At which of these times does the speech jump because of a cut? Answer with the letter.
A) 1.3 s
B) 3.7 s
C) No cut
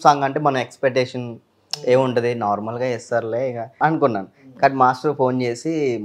B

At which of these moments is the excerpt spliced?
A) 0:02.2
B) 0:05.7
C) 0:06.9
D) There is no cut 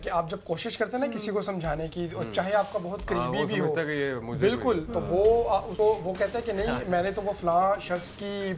B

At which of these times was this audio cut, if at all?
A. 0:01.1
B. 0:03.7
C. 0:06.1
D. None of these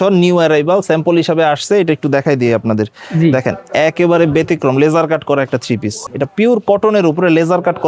C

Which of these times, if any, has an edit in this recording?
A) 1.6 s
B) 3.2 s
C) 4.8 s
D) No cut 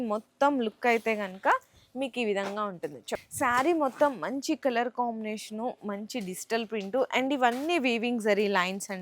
B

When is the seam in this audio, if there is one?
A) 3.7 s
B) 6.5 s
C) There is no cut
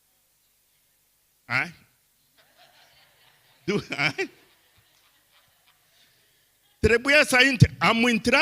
A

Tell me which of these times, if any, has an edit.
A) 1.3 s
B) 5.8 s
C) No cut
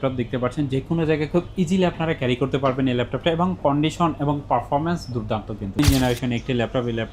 B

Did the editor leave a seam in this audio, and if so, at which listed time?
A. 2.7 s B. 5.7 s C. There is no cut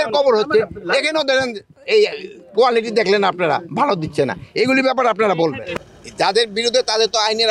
B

